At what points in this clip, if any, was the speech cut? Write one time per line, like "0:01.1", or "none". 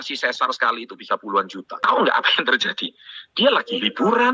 0:01.6